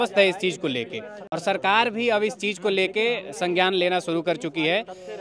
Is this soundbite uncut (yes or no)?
yes